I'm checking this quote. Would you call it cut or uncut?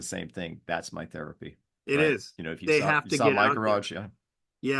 uncut